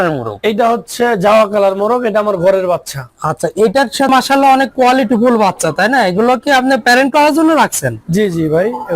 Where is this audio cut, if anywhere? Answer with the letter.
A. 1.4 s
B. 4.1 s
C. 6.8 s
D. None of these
B